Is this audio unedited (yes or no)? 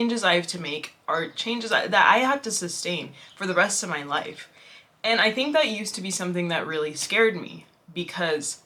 yes